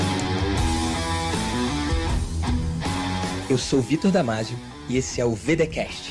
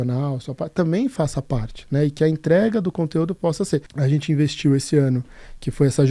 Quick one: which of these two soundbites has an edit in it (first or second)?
second